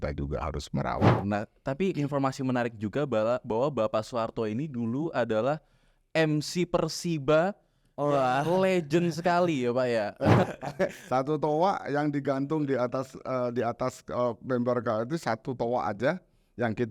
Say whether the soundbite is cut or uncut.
cut